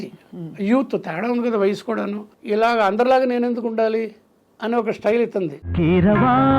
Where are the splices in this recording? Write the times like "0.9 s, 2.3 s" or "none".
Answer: 2.3 s, 5.6 s